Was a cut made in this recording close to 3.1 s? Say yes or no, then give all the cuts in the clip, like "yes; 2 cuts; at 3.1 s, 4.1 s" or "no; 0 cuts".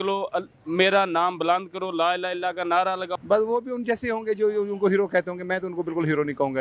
yes; 1 cut; at 3.1 s